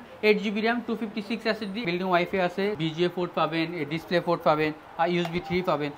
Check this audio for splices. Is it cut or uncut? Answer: cut